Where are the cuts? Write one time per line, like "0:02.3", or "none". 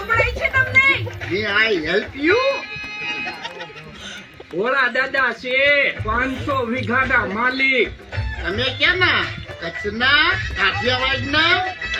none